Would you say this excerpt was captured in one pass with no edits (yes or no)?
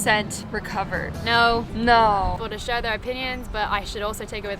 no